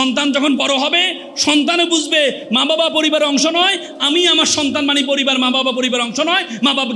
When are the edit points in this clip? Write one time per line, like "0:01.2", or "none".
none